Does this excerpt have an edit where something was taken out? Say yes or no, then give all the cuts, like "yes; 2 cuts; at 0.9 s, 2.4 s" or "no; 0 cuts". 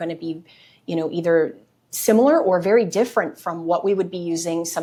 no; 0 cuts